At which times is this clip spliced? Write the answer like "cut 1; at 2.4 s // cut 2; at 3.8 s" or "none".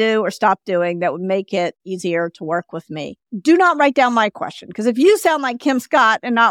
cut 1; at 3.3 s